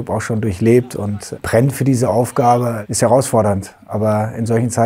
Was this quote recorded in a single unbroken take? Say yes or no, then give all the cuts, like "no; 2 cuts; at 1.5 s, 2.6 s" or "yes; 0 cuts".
no; 2 cuts; at 1.2 s, 2.8 s